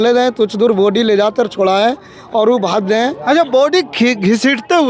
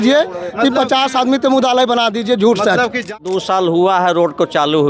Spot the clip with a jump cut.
second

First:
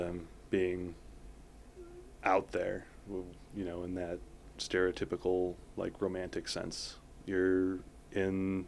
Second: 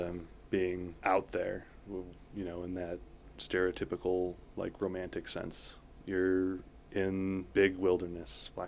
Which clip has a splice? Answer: second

